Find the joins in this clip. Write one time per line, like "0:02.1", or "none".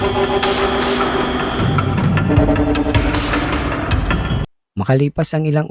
0:04.5